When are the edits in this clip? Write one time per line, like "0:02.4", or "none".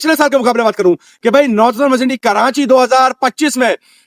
none

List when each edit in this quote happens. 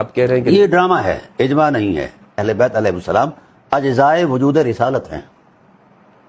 0:02.4

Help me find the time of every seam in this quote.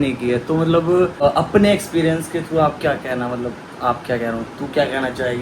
0:01.3

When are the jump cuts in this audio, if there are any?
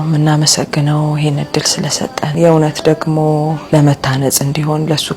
0:03.6

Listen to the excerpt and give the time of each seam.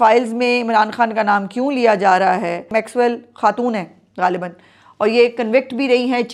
none

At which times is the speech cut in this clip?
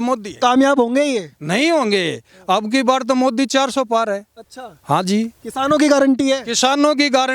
none

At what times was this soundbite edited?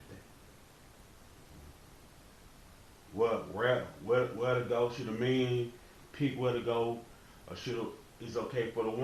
none

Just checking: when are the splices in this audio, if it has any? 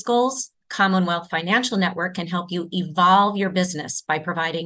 none

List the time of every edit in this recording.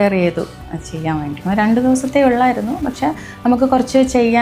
0:01.4

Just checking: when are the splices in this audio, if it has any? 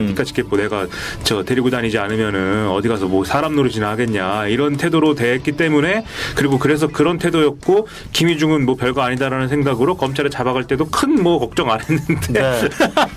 none

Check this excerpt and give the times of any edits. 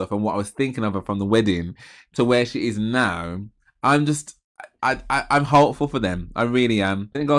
none

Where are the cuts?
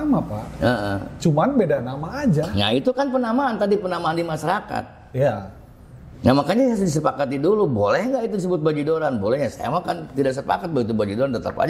none

